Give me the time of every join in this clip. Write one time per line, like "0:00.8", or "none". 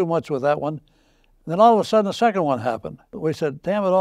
none